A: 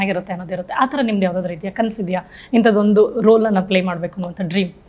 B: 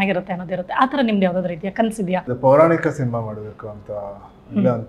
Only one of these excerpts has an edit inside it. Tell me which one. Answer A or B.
B